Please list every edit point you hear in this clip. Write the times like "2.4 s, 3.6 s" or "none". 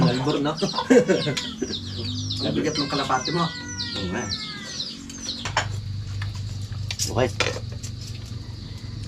5.5 s